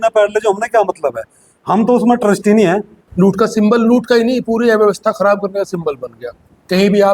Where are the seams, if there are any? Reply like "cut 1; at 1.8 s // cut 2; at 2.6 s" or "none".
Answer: cut 1; at 3.0 s